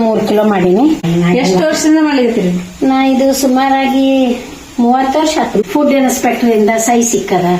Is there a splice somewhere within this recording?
yes; 2 cuts; at 1.0 s, 5.6 s

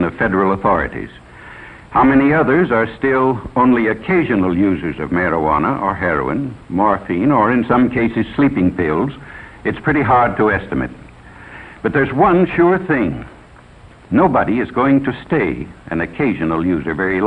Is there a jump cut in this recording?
no; 0 cuts

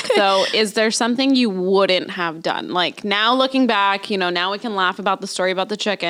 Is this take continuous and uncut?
yes; 0 cuts

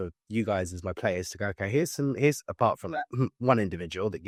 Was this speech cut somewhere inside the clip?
no; 0 cuts

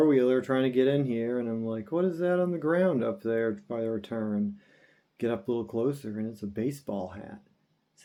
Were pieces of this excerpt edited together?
no; 0 cuts

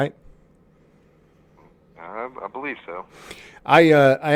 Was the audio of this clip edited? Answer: no; 0 cuts

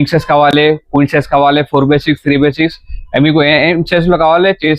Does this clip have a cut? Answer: no; 0 cuts

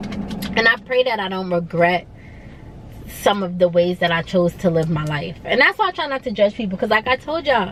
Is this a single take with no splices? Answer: yes; 0 cuts

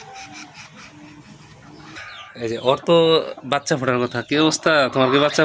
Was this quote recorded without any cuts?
no; 1 cut; at 2.0 s

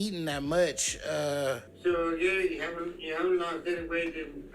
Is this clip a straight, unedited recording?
no; 1 cut; at 1.7 s

